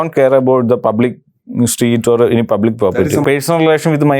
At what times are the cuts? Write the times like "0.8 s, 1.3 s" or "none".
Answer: 3.1 s

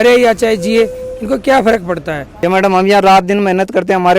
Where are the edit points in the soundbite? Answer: 2.2 s

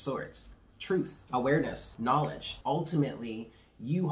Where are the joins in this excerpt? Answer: 1.2 s, 2.4 s

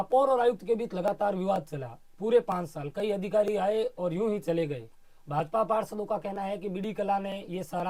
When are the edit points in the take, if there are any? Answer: none

